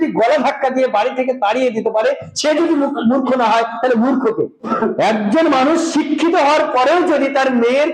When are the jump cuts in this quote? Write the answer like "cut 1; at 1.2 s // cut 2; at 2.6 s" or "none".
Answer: cut 1; at 4.7 s